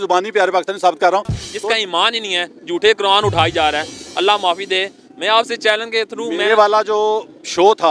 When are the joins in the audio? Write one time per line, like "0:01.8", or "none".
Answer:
0:01.5